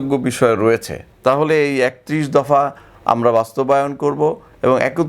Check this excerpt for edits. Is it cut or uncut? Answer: cut